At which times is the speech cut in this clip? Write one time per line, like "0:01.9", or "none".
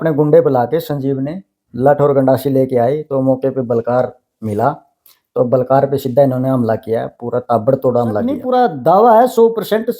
0:08.4